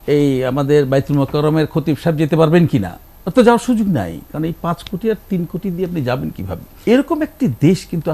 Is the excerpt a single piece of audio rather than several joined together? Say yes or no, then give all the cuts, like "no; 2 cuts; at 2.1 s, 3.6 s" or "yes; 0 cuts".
no; 1 cut; at 6.6 s